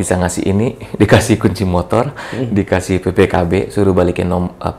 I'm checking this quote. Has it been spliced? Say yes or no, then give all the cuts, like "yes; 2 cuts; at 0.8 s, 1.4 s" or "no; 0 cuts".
no; 0 cuts